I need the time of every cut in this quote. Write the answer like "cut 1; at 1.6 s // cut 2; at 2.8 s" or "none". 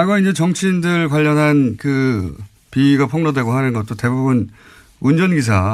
none